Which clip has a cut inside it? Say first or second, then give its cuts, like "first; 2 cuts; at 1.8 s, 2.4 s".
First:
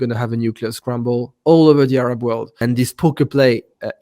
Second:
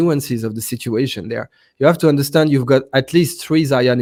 first; 1 cut; at 2.5 s